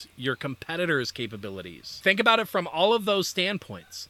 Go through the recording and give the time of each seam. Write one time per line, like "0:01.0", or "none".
0:01.9

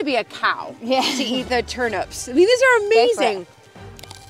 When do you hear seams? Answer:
none

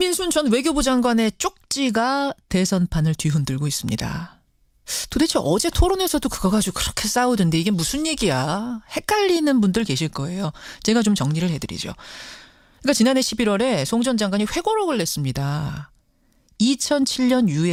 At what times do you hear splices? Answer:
none

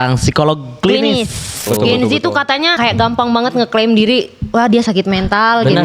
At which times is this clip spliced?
0:01.6
0:02.7

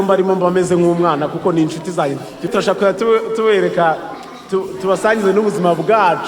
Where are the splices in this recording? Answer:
0:02.5

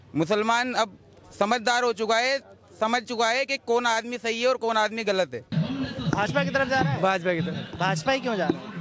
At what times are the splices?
0:05.5

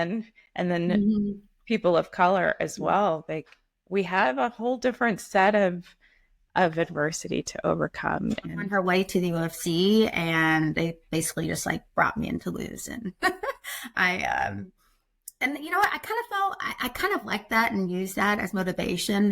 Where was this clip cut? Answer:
0:08.6

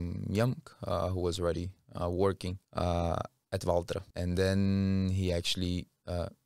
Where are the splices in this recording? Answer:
0:02.6
0:04.1

